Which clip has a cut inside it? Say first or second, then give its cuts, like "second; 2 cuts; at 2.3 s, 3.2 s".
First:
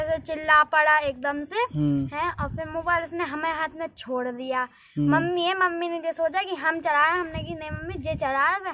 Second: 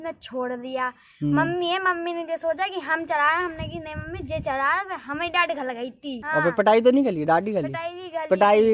second; 1 cut; at 6.2 s